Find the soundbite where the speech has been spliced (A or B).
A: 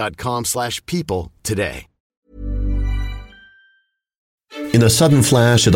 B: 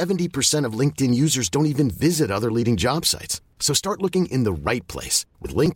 A